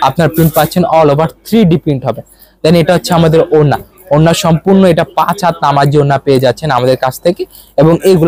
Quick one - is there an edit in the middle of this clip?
no; 0 cuts

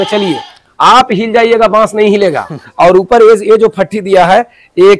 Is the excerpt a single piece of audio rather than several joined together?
no; 1 cut; at 2.6 s

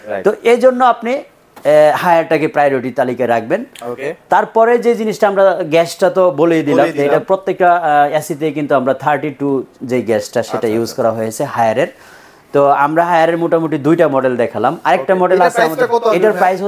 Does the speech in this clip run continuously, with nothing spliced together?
yes; 0 cuts

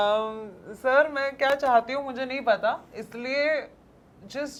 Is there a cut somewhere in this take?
no; 0 cuts

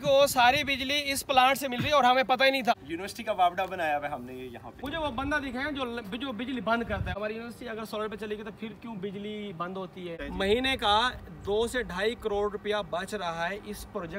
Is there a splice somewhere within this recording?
yes; 4 cuts; at 2.7 s, 4.8 s, 7.1 s, 10.2 s

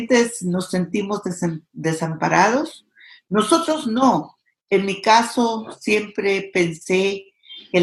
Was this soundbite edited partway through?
no; 0 cuts

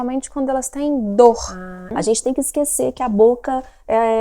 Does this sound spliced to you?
yes; 1 cut; at 1.9 s

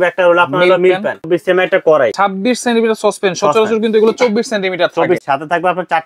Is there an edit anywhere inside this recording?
yes; 3 cuts; at 1.3 s, 2.1 s, 5.2 s

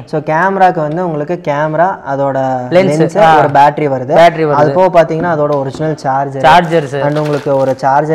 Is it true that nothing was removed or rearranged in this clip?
yes; 0 cuts

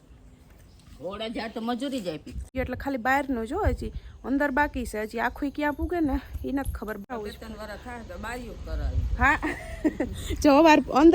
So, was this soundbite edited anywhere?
yes; 2 cuts; at 2.5 s, 7.0 s

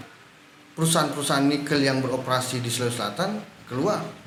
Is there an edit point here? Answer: no; 0 cuts

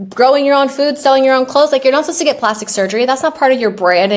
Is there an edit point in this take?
no; 0 cuts

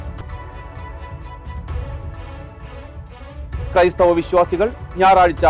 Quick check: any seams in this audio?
no; 0 cuts

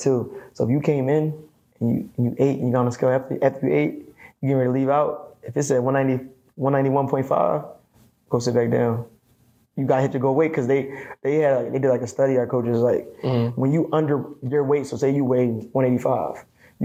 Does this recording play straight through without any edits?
yes; 0 cuts

